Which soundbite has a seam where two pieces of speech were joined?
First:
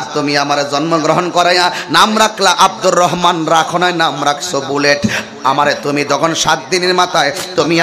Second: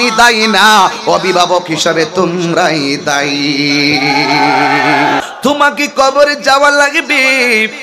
second; 1 cut; at 5.2 s

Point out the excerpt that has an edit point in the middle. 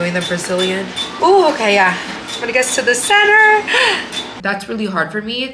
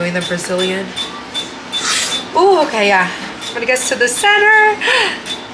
first; 2 cuts; at 1.1 s, 4.3 s

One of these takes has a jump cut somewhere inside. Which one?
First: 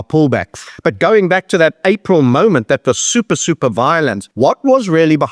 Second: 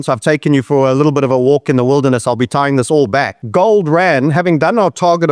first; 1 cut; at 4.2 s

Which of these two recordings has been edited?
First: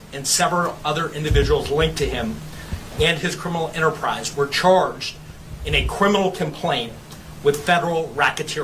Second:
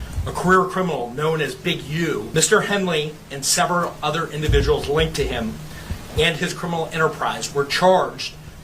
second; 1 cut; at 2.3 s

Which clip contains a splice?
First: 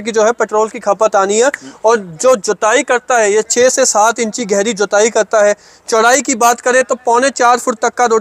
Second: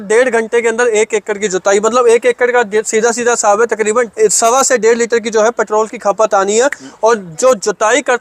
second; 1 cut; at 4.1 s

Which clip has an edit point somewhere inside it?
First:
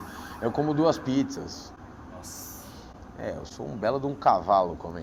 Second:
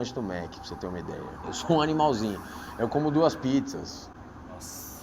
second; 1 cut; at 1.4 s

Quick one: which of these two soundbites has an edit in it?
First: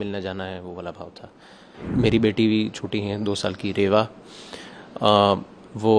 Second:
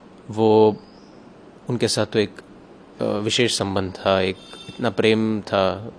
first; 1 cut; at 1.8 s

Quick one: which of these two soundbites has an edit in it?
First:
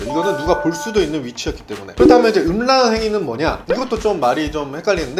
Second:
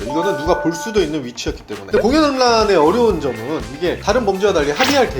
second; 1 cut; at 1.8 s

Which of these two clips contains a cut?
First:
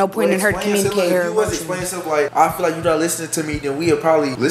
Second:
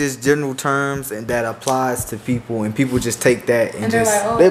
first; 1 cut; at 2.3 s

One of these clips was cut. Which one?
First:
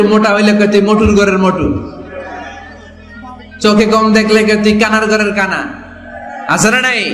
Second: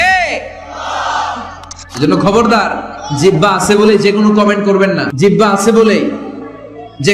second; 2 cuts; at 1.8 s, 5.1 s

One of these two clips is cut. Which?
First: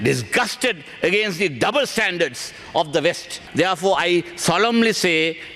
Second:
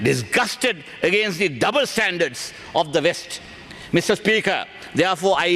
first; 1 cut; at 3.4 s

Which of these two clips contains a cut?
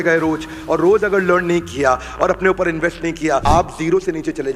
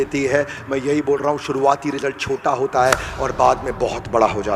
first; 1 cut; at 3.4 s

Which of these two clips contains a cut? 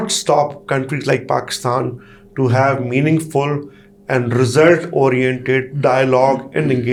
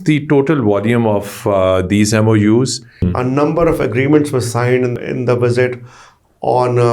second; 2 cuts; at 3.1 s, 5.0 s

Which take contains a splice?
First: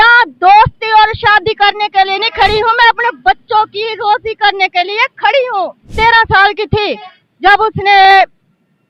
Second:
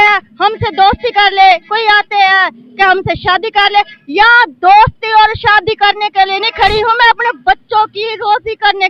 first; 1 cut; at 5.9 s

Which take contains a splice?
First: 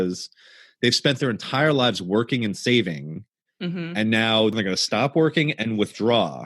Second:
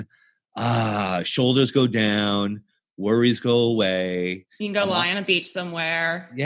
first; 1 cut; at 4.5 s

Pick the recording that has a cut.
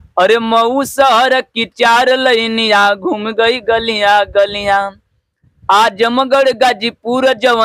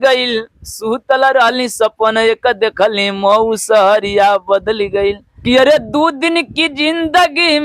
second; 1 cut; at 5.3 s

